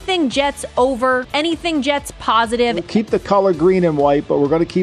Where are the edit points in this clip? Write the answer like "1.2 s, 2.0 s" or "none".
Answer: 1.3 s, 2.8 s